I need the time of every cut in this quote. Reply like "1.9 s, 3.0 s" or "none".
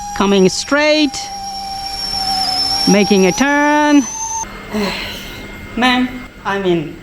4.4 s